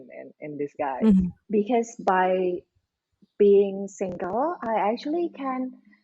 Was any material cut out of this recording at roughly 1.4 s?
yes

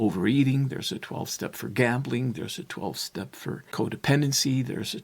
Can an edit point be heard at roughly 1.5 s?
no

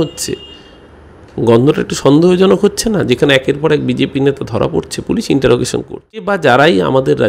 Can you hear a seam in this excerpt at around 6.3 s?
yes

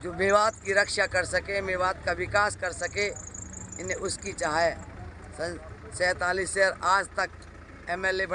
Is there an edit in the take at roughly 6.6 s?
no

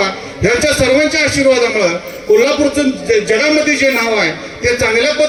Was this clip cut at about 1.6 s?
no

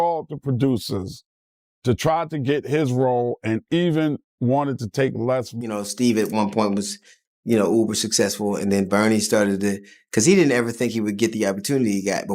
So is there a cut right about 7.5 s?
no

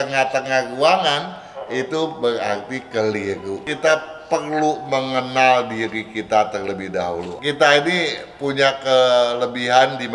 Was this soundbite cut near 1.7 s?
no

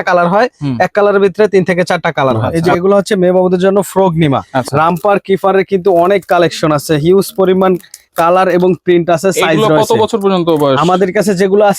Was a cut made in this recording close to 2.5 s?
yes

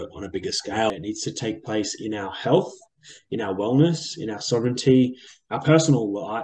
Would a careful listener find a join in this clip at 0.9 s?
yes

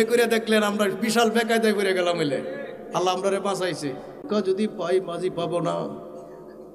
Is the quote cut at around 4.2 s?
yes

